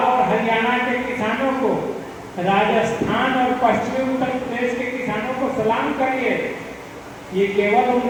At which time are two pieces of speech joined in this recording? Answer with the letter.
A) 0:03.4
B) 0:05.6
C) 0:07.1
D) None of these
D